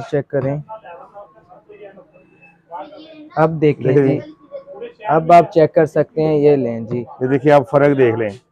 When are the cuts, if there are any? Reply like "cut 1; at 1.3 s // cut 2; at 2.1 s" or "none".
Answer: none